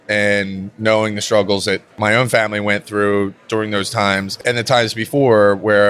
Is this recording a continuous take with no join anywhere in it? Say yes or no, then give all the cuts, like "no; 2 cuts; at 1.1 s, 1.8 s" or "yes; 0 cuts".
no; 2 cuts; at 2.0 s, 4.3 s